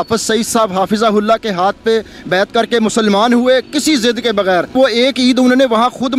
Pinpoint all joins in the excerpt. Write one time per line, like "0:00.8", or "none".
0:04.7